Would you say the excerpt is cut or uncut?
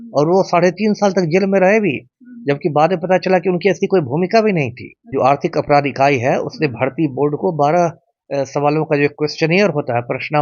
cut